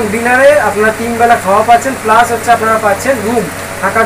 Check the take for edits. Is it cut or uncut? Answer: uncut